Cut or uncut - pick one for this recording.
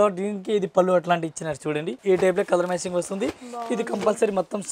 cut